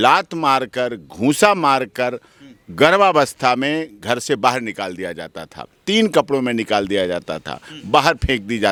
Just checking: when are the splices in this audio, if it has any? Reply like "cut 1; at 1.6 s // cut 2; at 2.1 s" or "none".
none